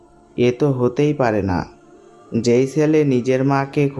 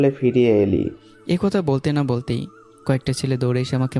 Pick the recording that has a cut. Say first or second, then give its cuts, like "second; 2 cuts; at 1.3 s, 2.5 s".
second; 1 cut; at 1.1 s